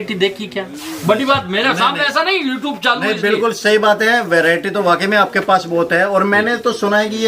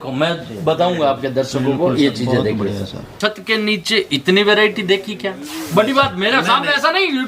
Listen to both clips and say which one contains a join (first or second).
second